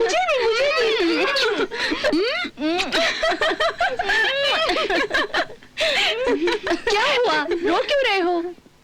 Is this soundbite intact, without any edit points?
yes; 0 cuts

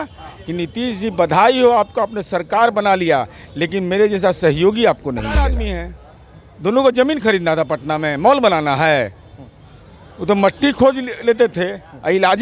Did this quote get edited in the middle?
yes; 1 cut; at 5.6 s

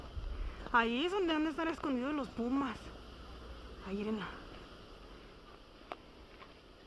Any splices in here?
no; 0 cuts

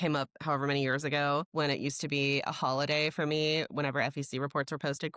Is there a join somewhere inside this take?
yes; 1 cut; at 1.4 s

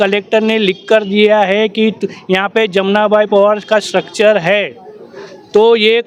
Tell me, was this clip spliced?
no; 0 cuts

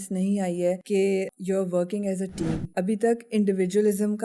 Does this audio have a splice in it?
yes; 2 cuts; at 1.1 s, 2.6 s

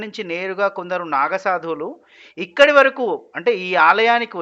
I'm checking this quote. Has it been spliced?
no; 0 cuts

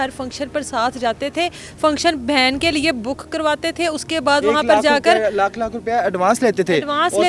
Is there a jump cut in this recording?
no; 0 cuts

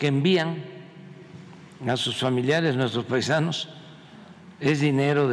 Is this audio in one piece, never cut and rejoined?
yes; 0 cuts

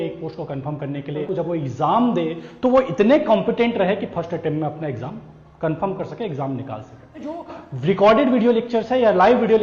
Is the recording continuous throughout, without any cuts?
no; 2 cuts; at 1.2 s, 7.4 s

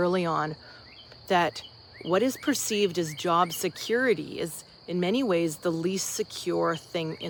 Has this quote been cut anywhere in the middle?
no; 0 cuts

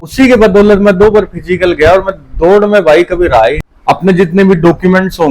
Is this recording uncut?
no; 1 cut; at 3.7 s

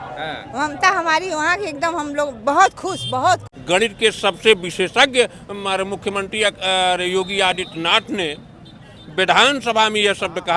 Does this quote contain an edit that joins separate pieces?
yes; 1 cut; at 3.5 s

